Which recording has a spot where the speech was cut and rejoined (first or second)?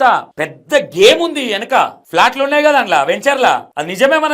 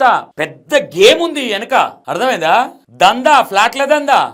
first